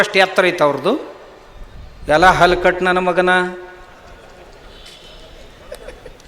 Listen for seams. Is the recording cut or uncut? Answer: uncut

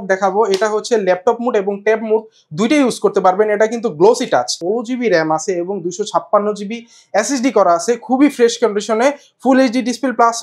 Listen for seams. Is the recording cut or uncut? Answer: cut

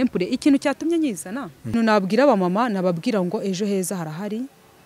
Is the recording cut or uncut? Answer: cut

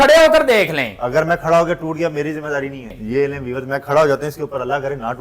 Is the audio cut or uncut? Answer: cut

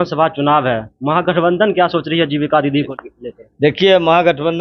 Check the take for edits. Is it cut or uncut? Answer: cut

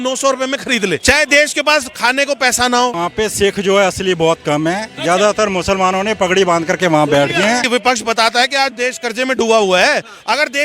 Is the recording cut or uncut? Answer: cut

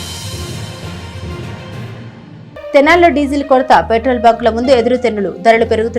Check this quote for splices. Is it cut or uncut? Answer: uncut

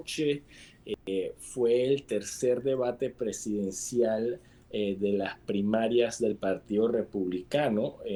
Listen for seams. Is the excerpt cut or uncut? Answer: uncut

